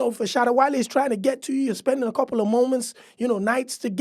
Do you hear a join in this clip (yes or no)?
no